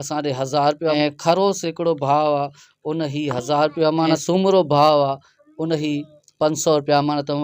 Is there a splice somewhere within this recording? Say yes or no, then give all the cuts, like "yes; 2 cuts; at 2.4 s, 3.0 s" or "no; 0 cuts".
yes; 2 cuts; at 0.9 s, 4.2 s